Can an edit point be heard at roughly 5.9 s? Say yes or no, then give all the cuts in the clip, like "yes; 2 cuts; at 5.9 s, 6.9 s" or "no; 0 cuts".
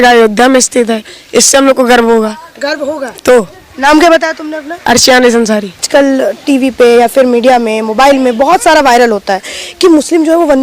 yes; 1 cut; at 5.9 s